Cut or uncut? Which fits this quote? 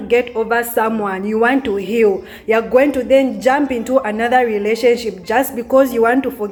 uncut